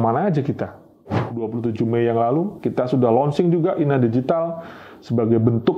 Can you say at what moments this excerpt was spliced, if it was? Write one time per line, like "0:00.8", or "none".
0:01.4
0:02.6